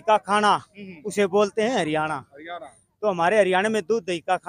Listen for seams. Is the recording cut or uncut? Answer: uncut